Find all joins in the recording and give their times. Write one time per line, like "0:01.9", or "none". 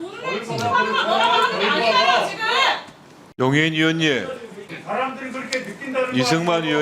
0:04.6

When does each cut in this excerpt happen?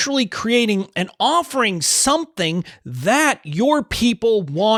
none

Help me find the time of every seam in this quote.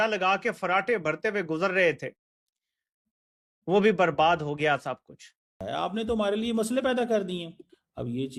none

